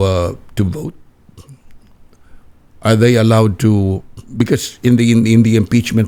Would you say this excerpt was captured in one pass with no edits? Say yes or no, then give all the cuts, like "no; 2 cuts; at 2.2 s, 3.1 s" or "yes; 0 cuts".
yes; 0 cuts